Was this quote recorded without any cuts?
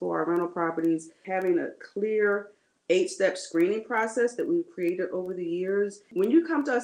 no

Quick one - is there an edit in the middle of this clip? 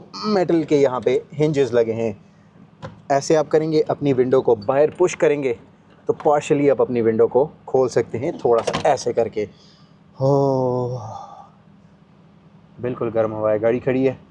no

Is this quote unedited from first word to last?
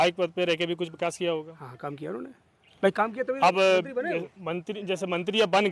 yes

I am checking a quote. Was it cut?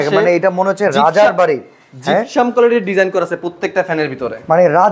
no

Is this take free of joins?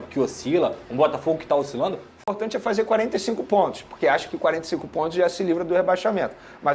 no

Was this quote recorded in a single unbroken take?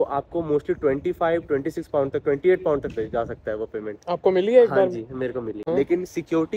no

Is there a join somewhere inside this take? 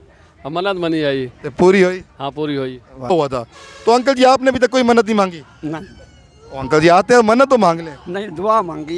yes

